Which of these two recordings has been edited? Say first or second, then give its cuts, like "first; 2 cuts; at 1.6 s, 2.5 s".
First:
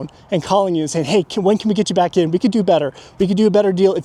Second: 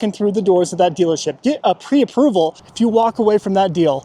second; 1 cut; at 2.6 s